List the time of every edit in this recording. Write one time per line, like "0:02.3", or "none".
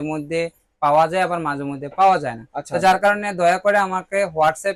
none